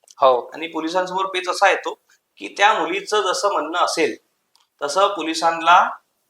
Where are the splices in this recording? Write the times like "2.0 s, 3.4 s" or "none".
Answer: none